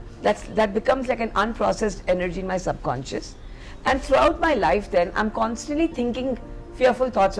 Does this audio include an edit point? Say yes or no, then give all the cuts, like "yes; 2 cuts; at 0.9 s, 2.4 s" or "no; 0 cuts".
no; 0 cuts